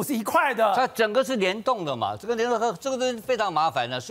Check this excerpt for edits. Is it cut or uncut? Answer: uncut